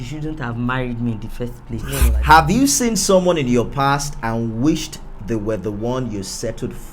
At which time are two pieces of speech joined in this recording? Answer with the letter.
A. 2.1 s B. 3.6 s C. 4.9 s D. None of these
A